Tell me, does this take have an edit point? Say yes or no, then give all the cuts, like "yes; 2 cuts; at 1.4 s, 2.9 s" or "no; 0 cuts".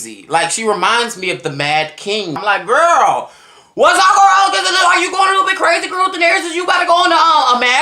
yes; 1 cut; at 2.4 s